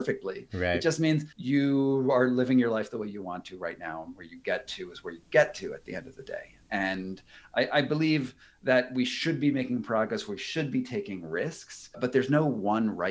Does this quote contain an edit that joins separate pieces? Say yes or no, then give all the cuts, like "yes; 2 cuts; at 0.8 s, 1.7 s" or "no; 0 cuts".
yes; 3 cuts; at 1.3 s, 6.6 s, 12.0 s